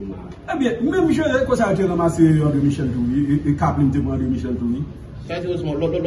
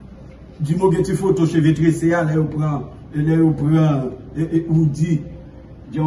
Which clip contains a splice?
second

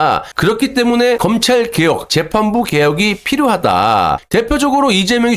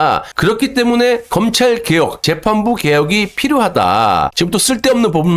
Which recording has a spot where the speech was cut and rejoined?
first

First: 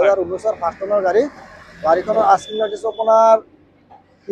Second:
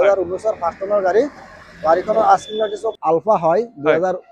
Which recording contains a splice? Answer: second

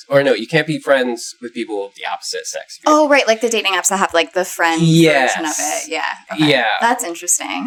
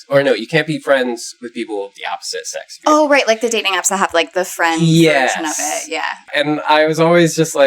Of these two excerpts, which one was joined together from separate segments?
second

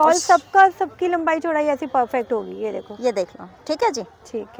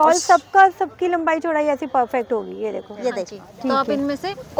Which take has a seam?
second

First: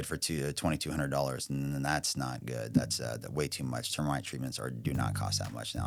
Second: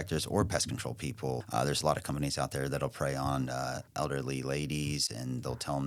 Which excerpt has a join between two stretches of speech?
second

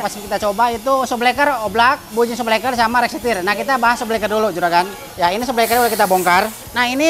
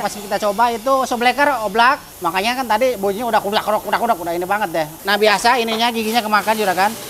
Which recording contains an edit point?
second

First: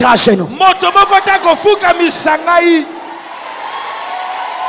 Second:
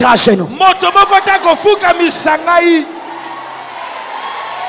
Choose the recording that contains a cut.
first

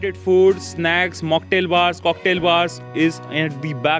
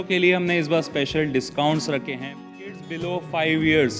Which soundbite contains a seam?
second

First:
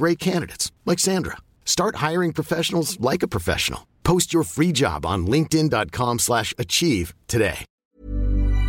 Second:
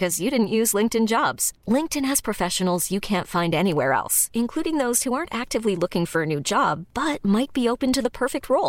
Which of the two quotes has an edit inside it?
first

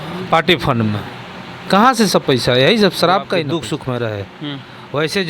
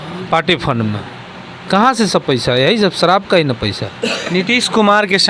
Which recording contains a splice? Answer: first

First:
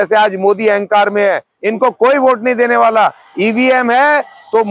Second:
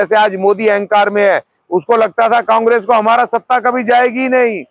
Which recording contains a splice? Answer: first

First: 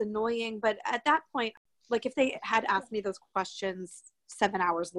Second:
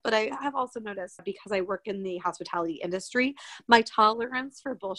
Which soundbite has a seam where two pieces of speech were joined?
first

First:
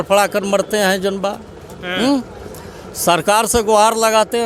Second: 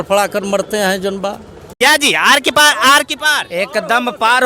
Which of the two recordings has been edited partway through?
second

